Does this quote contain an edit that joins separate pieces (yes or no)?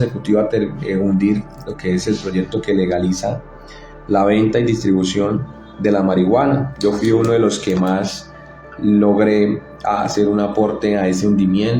no